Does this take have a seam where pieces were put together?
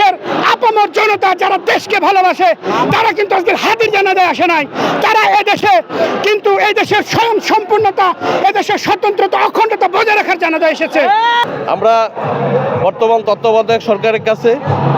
yes; 1 cut; at 11.4 s

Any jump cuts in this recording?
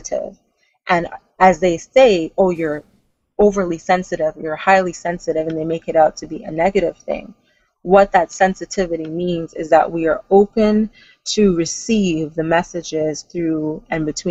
no; 0 cuts

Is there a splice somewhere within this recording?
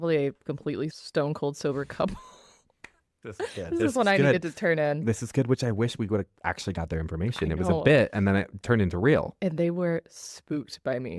yes; 1 cut; at 1.0 s

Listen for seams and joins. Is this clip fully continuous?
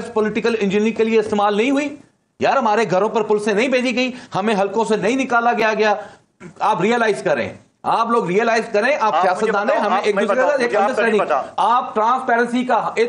yes; 0 cuts

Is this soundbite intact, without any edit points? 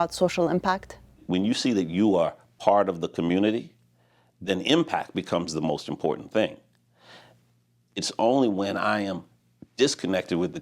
no; 1 cut; at 1.2 s

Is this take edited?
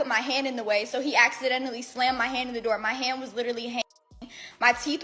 no; 0 cuts

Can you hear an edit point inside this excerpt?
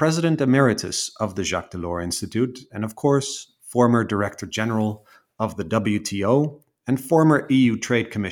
no; 0 cuts

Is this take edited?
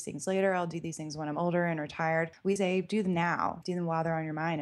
yes; 2 cuts; at 2.3 s, 3.6 s

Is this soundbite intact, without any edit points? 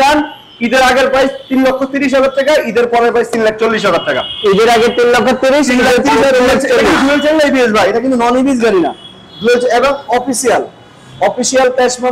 yes; 0 cuts

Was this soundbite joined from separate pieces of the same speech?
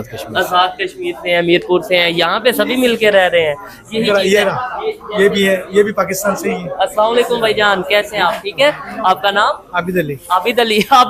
no; 0 cuts

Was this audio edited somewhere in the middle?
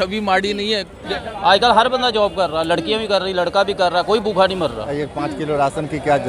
yes; 2 cuts; at 1.0 s, 4.9 s

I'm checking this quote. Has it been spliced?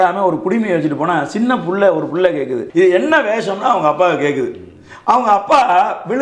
yes; 1 cut; at 2.6 s

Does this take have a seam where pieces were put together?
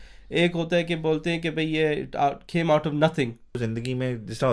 yes; 1 cut; at 3.6 s

